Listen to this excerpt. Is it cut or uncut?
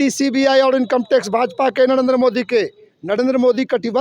cut